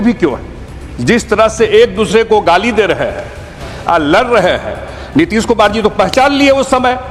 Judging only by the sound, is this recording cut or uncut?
uncut